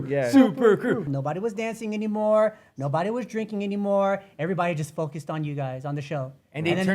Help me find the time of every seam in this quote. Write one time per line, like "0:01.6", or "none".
0:01.1